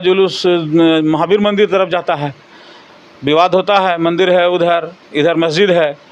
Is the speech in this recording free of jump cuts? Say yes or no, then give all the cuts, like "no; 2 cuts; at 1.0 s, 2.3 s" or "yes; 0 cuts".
yes; 0 cuts